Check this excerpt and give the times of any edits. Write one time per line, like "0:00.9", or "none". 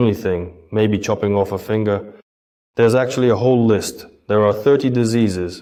none